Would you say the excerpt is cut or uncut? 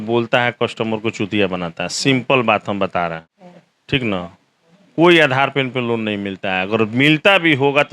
uncut